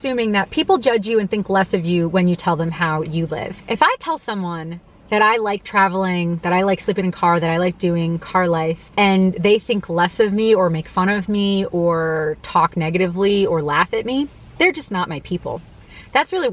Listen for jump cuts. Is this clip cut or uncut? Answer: uncut